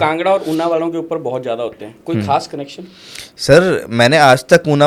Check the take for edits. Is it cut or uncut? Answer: uncut